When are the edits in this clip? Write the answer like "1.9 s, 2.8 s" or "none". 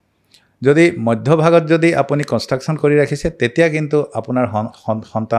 none